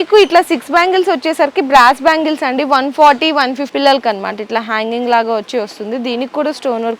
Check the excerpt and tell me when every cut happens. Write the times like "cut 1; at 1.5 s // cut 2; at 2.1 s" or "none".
cut 1; at 3.7 s